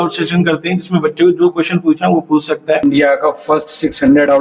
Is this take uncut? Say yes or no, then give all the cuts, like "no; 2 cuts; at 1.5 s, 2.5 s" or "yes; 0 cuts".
no; 1 cut; at 2.8 s